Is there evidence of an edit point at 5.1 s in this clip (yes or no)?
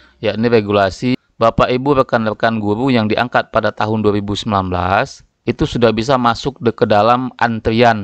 no